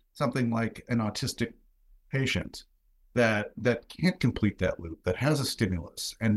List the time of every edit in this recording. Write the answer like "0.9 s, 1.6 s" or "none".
none